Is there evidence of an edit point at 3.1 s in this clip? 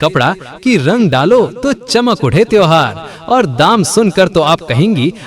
yes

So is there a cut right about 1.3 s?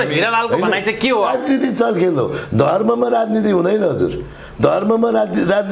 yes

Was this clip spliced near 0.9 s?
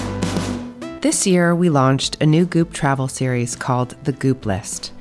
yes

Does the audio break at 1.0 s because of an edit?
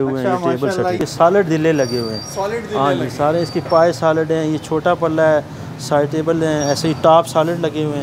yes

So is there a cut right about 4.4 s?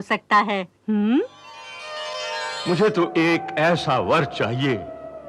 no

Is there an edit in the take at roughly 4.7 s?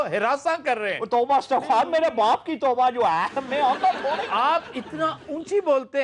no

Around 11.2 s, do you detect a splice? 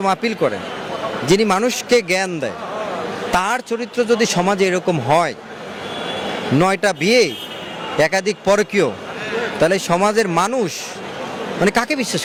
no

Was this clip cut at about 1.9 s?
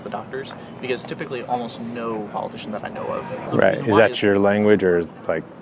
no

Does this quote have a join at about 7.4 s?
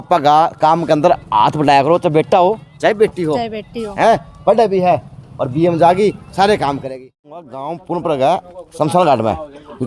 yes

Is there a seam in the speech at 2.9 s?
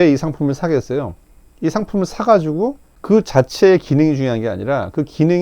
yes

